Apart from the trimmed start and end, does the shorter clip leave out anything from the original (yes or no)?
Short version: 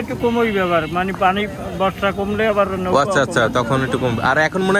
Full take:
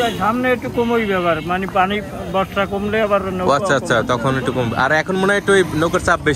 no